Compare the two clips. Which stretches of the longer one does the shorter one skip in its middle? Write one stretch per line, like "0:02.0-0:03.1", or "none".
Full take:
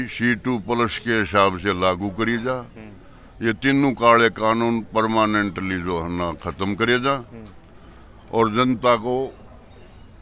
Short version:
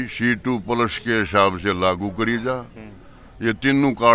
none